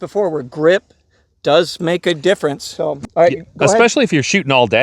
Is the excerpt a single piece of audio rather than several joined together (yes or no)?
no